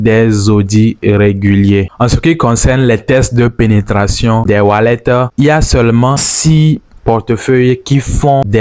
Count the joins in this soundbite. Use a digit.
0